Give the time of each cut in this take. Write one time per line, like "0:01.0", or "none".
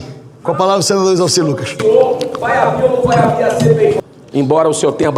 0:04.2